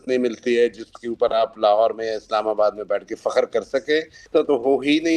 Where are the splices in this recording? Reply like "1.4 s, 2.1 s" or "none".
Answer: 4.2 s

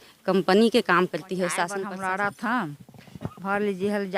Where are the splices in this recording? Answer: 1.8 s

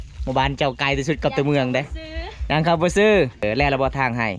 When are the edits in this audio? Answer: 3.4 s

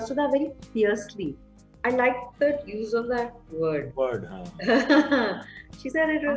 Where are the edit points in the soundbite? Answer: none

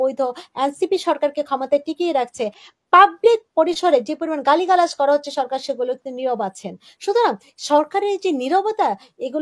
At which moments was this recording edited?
2.6 s

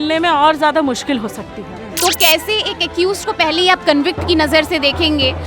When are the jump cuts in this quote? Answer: 1.9 s

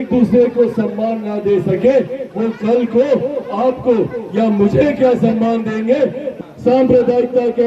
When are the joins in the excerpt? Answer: 6.2 s

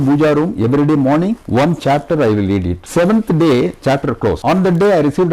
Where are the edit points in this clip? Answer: 1.4 s, 2.8 s, 4.4 s

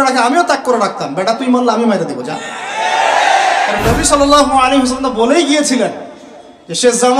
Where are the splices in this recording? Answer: 3.8 s

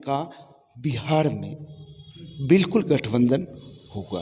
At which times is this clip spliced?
none

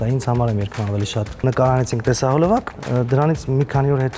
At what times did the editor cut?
1.4 s, 2.8 s

